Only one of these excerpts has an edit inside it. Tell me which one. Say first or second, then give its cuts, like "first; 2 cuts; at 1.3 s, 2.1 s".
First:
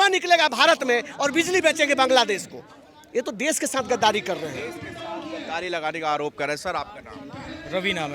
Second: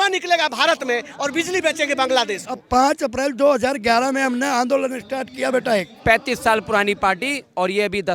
second; 2 cuts; at 2.6 s, 5.9 s